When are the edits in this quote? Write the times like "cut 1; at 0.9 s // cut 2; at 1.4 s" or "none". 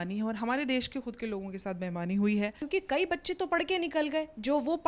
cut 1; at 2.6 s